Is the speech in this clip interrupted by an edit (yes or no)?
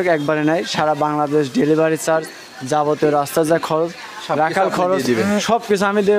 no